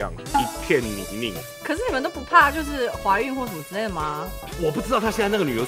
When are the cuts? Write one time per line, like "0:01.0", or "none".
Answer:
0:01.6